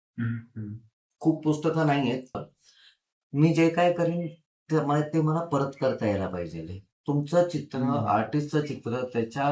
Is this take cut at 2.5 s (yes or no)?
yes